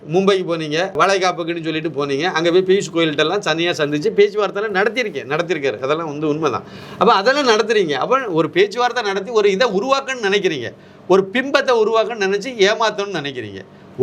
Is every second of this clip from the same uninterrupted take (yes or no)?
no